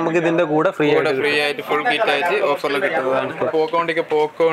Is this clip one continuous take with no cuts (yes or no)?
no